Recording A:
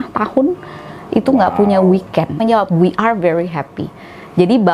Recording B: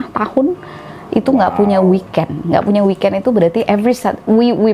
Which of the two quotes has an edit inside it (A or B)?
A